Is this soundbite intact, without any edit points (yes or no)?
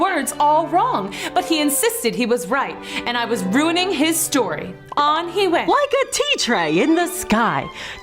no